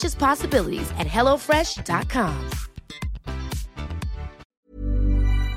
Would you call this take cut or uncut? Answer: cut